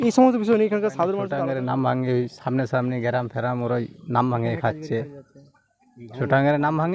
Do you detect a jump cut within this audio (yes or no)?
yes